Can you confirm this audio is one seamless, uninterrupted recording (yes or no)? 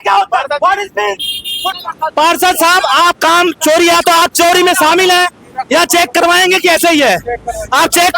no